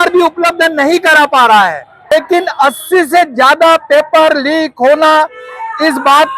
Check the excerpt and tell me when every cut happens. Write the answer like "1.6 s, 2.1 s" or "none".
2.1 s